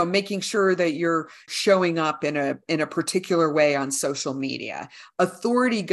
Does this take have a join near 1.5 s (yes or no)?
yes